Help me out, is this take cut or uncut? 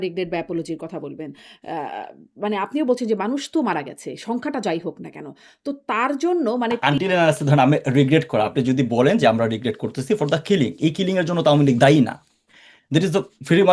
cut